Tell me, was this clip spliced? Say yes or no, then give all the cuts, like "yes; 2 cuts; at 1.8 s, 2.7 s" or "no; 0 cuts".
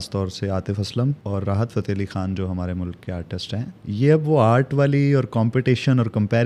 yes; 2 cuts; at 1.2 s, 3.8 s